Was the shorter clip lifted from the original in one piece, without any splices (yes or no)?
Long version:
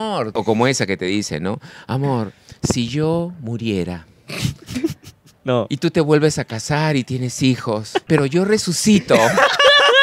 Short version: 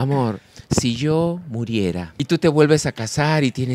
no